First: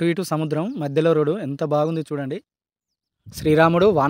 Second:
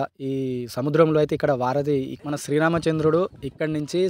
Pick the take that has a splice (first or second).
second